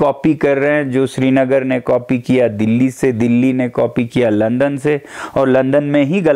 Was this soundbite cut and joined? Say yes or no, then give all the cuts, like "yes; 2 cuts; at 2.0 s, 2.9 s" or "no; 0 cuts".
no; 0 cuts